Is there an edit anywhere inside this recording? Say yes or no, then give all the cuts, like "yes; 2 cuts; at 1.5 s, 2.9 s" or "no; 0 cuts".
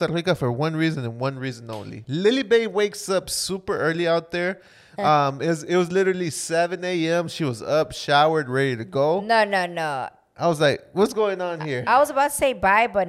no; 0 cuts